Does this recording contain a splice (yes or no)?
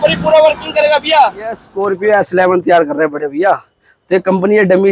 yes